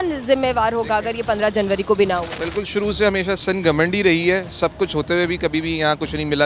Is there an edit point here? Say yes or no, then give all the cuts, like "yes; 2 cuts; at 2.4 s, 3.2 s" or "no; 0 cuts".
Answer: no; 0 cuts